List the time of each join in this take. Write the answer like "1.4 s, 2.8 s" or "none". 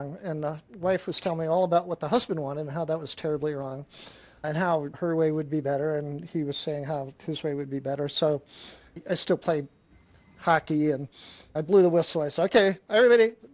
9.0 s